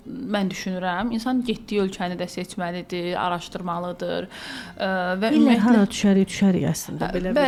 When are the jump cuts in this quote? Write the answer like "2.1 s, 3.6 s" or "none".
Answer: none